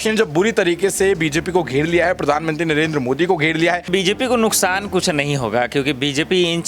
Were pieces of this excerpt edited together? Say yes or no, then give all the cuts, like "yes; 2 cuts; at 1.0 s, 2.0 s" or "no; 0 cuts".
yes; 1 cut; at 3.8 s